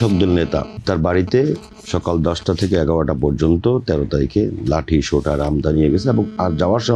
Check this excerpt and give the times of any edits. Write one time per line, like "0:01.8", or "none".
0:00.8
0:01.7

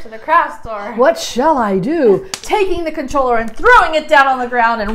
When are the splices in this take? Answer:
0:02.3

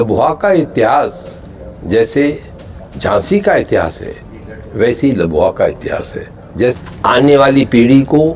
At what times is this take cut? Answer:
0:06.8

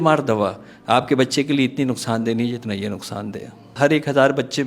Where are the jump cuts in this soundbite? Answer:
0:03.7

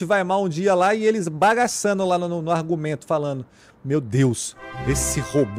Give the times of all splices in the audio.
0:01.3

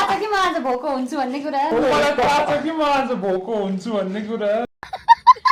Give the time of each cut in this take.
none

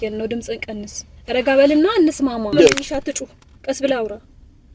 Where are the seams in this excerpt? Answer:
0:02.5

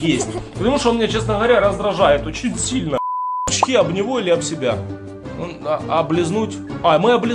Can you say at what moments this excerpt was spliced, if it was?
0:03.4

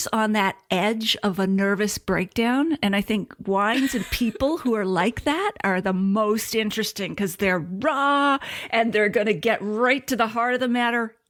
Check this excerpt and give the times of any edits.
none

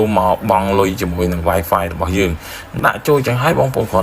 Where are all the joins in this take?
0:02.8

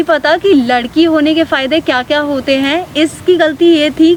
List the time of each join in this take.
none

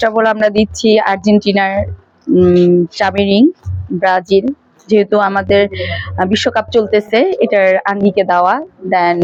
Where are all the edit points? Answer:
none

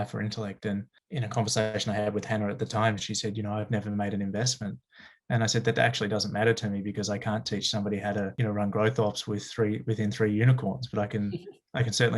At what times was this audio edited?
0:01.0

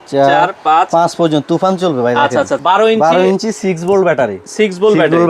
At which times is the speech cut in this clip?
0:02.6

